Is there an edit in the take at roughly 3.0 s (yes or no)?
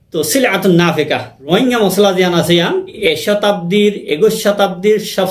yes